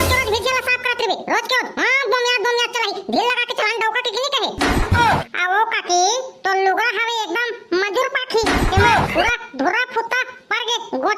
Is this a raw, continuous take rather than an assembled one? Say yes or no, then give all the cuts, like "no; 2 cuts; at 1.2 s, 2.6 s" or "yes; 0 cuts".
no; 1 cut; at 5.2 s